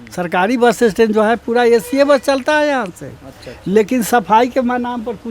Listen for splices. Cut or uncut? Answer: uncut